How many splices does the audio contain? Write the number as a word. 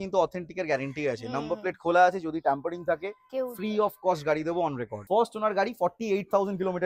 one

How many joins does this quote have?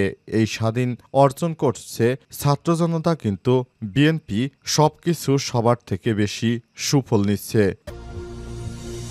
one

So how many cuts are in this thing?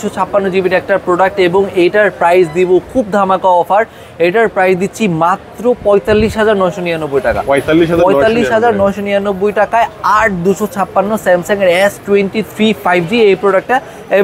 zero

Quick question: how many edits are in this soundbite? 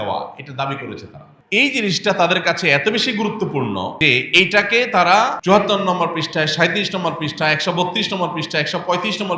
three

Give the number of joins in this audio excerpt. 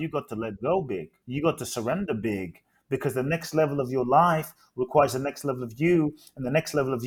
one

